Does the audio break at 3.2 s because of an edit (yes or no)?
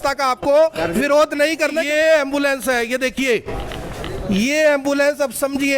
no